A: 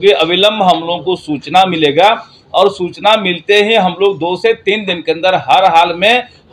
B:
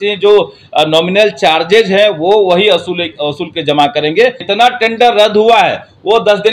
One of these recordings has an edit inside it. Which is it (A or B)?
B